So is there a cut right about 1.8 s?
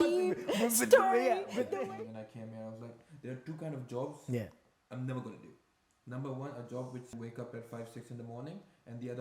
yes; 2 cuts; at 1.8 s, 7.1 s

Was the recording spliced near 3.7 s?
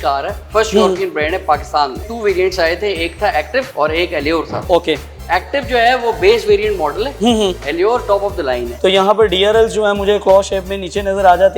yes; 4 cuts; at 2.0 s, 3.7 s, 4.6 s, 8.7 s

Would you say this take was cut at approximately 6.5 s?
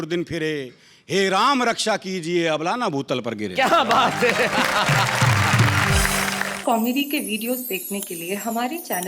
yes; 1 cut; at 6.5 s

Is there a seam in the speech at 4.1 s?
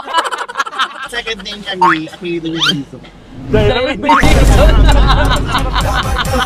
no; 1 cut; at 1.1 s

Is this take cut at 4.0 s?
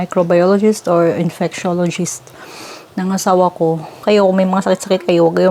yes; 1 cut; at 4.0 s

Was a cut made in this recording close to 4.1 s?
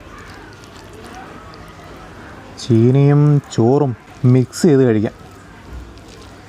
yes; 1 cut; at 4.1 s

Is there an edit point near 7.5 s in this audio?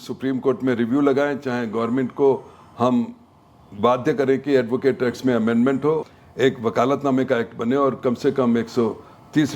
no; 1 cut; at 6.0 s

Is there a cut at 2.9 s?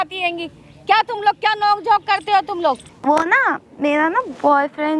yes; 1 cut; at 2.9 s

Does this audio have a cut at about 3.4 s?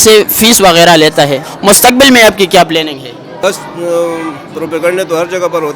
yes; 2 cuts; at 1.5 s, 3.4 s

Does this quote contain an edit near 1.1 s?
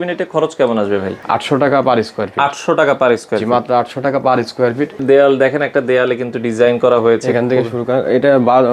yes; 2 cuts; at 1.1 s, 5.0 s

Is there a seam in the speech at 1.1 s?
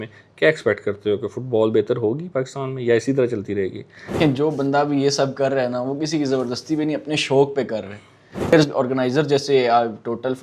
no; 2 cuts; at 4.1 s, 8.5 s

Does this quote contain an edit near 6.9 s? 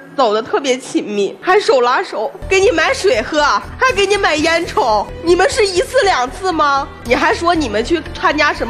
yes; 5 cuts; at 1.4 s, 2.4 s, 3.7 s, 5.1 s, 6.9 s

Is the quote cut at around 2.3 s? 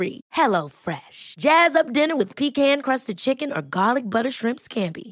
no; 0 cuts

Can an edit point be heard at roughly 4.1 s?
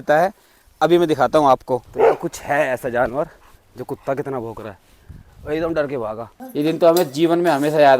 no; 2 cuts; at 1.9 s, 6.3 s

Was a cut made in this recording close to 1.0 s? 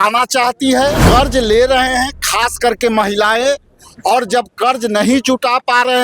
yes; 1 cut; at 1.0 s

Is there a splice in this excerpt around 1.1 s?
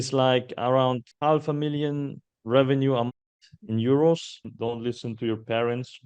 yes; 2 cuts; at 1.1 s, 4.5 s

